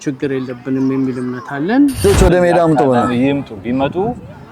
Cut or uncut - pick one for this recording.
cut